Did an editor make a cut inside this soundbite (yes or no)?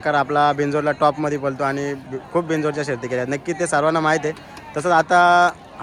no